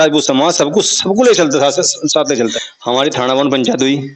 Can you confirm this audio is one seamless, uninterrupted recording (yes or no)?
no